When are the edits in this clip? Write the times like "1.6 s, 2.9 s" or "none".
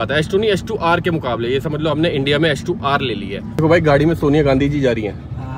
3.6 s